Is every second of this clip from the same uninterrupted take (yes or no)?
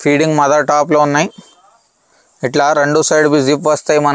yes